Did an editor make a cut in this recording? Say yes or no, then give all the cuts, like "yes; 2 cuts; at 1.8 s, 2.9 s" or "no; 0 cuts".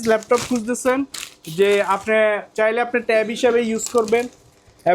no; 0 cuts